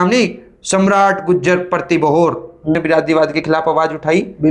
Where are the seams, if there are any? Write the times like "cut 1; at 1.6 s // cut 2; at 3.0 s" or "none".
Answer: cut 1; at 2.8 s